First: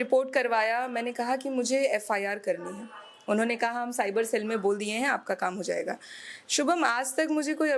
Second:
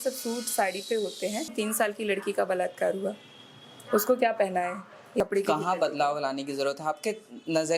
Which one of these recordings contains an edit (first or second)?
second